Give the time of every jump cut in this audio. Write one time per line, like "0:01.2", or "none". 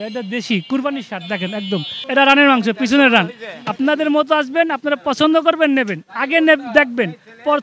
0:02.0